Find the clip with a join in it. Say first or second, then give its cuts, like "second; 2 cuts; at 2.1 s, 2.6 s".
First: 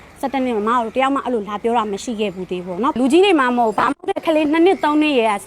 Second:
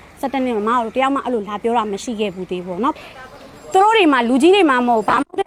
first; 1 cut; at 3.0 s